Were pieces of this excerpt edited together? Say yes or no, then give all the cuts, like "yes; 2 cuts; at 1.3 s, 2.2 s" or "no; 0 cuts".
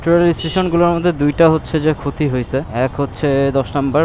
no; 0 cuts